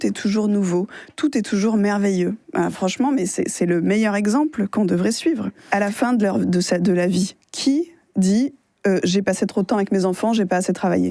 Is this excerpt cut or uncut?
cut